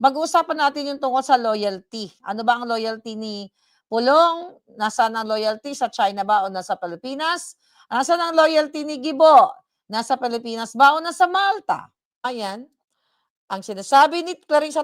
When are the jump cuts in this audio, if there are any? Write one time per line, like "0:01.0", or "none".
0:12.2